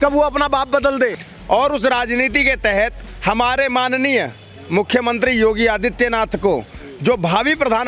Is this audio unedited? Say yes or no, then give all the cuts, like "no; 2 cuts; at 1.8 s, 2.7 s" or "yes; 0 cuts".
no; 1 cut; at 1.2 s